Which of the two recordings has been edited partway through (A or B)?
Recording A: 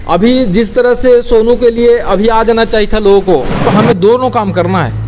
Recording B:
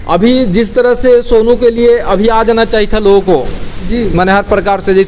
A